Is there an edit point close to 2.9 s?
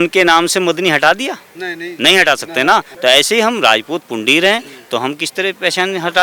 yes; 1 cut; at 2.9 s

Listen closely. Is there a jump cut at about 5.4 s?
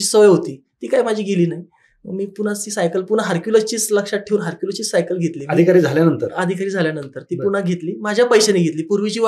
no; 0 cuts

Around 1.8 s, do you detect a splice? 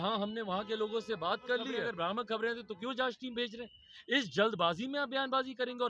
yes; 1 cut; at 1.8 s

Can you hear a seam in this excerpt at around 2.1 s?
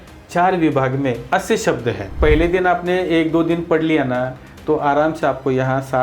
yes; 1 cut; at 2.1 s

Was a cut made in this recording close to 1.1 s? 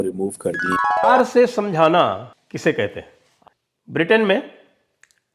yes; 1 cut; at 1.1 s

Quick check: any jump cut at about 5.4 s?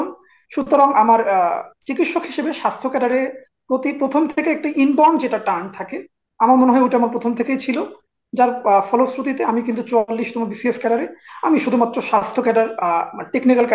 no; 0 cuts

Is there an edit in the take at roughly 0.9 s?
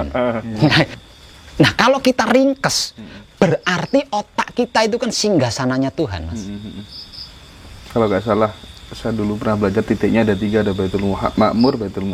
yes; 1 cut; at 0.9 s

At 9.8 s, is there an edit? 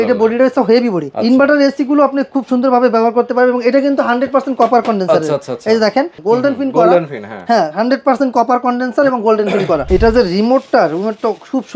yes; 3 cuts; at 1.1 s, 6.2 s, 9.8 s

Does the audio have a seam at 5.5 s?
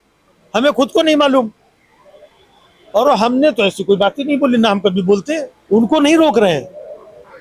yes; 1 cut; at 5.5 s

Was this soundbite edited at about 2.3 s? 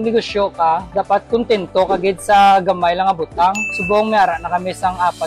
no; 1 cut; at 3.7 s

